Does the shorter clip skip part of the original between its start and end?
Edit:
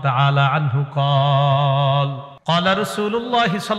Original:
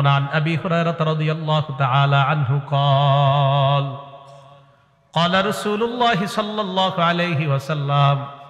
yes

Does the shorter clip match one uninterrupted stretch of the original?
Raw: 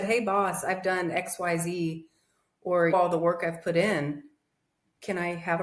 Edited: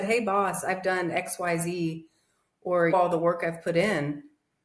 yes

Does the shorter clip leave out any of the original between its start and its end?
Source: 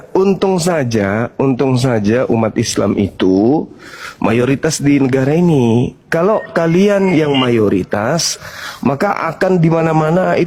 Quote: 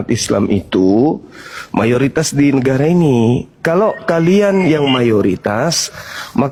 no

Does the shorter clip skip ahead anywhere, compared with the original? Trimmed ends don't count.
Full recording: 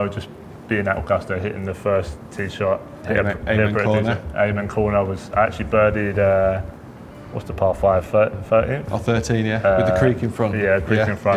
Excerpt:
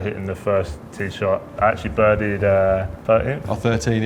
yes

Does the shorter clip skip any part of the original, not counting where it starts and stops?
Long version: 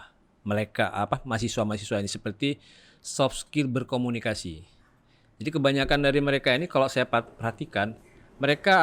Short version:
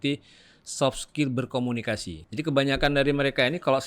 yes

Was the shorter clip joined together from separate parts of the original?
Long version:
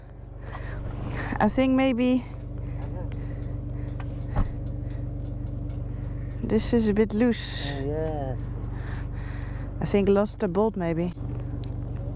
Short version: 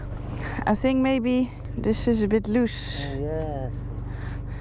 yes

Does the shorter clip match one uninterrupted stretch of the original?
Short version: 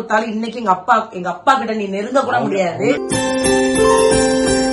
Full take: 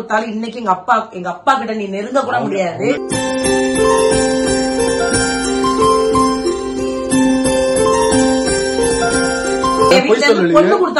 yes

